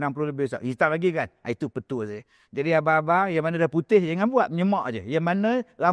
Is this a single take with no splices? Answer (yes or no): yes